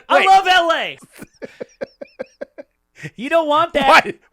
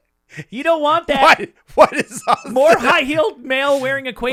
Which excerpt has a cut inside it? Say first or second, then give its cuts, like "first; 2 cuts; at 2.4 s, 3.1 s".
first; 1 cut; at 1.0 s